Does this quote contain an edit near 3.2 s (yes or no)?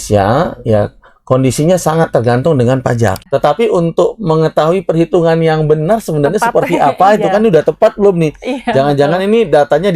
yes